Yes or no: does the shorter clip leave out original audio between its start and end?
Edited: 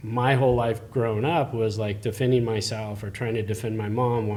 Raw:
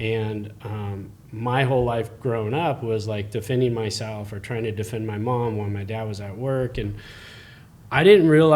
no